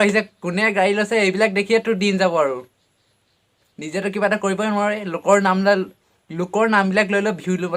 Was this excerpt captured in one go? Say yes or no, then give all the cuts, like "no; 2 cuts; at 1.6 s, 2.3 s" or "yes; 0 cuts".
yes; 0 cuts